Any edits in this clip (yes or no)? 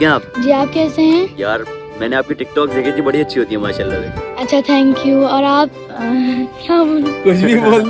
no